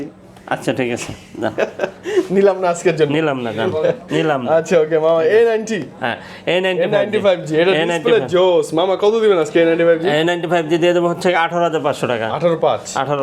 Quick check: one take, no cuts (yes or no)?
yes